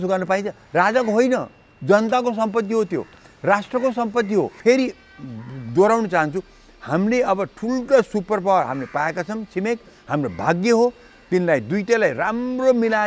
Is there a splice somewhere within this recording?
yes; 1 cut; at 4.6 s

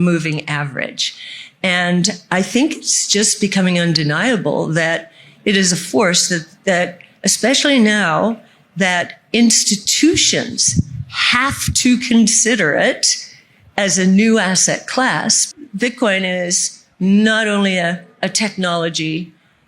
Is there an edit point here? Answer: yes; 1 cut; at 15.5 s

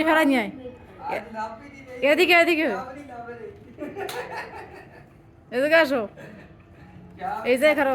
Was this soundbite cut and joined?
no; 0 cuts

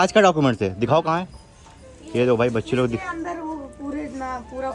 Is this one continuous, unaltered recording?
yes; 0 cuts

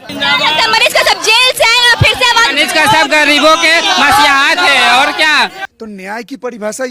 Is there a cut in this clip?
yes; 1 cut; at 5.7 s

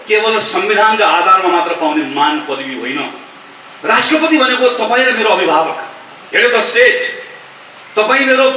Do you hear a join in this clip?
no; 0 cuts

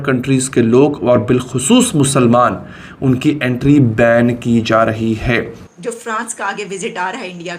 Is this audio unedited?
no; 1 cut; at 5.6 s

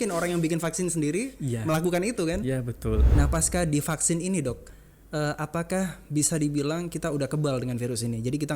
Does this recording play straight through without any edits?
no; 1 cut; at 3.1 s

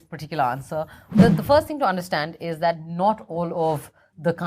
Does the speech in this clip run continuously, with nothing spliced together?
no; 1 cut; at 1.1 s

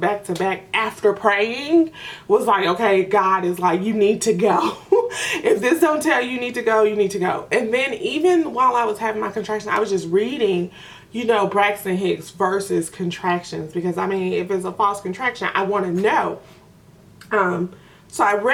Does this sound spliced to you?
no; 0 cuts

